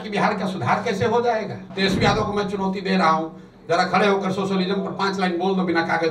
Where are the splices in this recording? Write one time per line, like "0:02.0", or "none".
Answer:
0:01.7